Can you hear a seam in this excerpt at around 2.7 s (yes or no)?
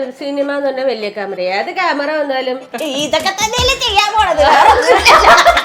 yes